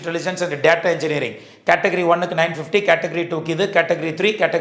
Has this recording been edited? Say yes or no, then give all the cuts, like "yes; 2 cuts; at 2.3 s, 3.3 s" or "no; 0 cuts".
no; 0 cuts